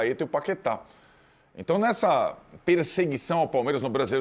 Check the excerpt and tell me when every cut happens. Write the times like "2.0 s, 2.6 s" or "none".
none